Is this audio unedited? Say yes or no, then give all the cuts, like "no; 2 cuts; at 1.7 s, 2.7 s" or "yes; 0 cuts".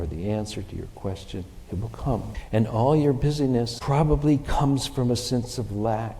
no; 2 cuts; at 2.4 s, 3.8 s